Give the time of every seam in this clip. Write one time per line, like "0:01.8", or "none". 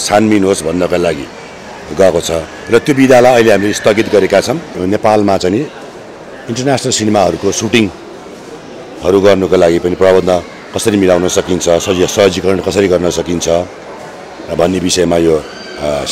0:04.7